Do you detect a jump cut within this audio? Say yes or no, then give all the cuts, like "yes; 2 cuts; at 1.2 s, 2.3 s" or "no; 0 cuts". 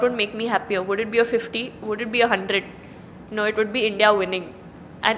no; 0 cuts